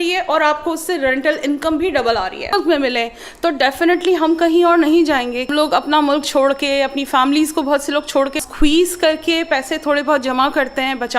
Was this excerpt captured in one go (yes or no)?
no